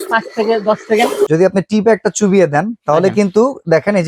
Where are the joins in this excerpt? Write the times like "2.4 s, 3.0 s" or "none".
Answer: 1.3 s, 2.8 s